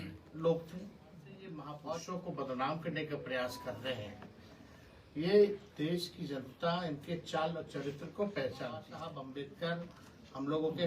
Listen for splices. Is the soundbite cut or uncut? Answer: cut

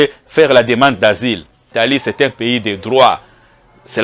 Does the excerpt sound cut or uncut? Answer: cut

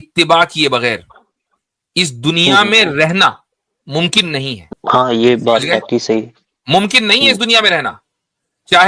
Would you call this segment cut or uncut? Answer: cut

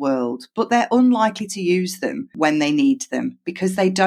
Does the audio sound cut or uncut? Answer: cut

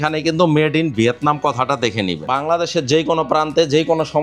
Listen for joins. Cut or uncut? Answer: cut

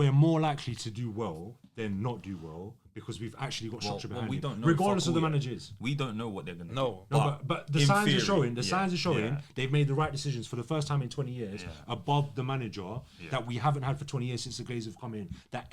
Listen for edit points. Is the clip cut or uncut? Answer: uncut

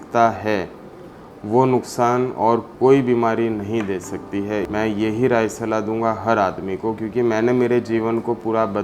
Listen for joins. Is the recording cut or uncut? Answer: cut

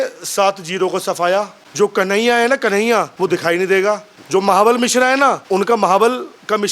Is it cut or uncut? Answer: cut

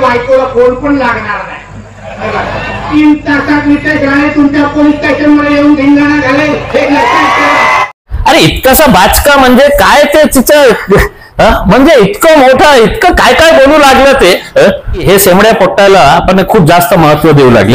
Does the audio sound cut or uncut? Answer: cut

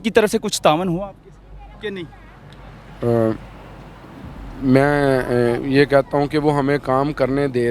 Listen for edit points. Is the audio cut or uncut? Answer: uncut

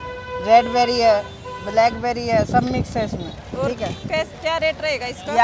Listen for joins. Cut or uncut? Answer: uncut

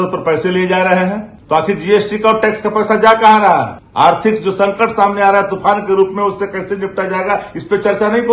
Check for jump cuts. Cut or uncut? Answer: cut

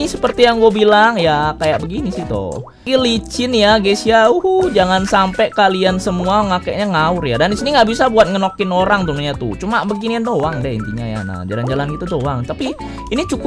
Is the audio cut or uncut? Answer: cut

